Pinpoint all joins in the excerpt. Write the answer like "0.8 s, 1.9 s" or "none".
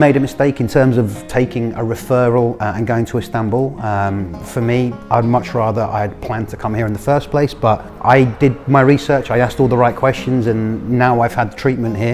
none